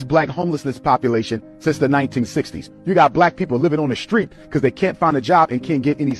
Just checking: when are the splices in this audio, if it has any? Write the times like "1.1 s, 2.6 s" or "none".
none